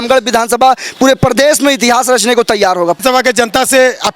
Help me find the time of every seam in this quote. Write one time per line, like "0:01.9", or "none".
0:03.0